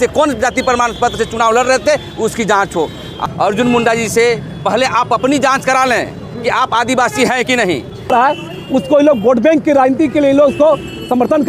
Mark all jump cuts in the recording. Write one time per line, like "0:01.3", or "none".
0:03.2
0:08.1